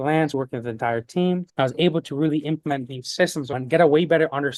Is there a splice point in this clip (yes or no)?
no